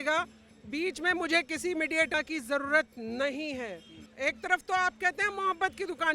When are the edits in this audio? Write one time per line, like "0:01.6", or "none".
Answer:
0:04.0